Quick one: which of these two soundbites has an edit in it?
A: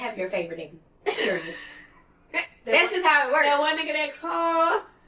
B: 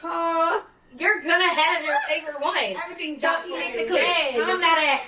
B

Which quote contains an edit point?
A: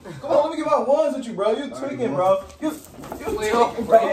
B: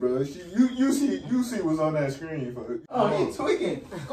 B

